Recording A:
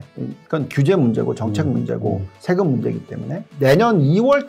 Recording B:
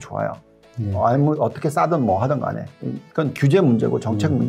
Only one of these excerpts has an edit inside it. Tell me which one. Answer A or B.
A